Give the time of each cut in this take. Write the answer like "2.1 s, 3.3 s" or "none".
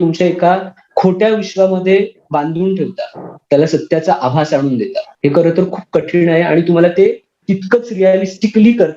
5.1 s